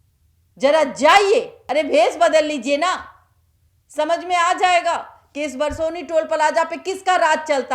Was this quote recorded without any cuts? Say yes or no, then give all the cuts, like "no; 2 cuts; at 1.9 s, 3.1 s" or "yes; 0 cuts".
yes; 0 cuts